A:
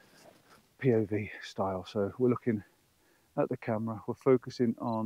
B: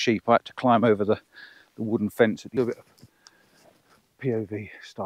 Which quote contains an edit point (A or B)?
B